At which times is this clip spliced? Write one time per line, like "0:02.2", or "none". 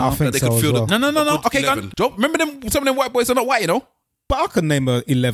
0:01.9
0:04.2